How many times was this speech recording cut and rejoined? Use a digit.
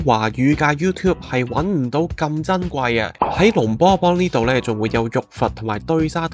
1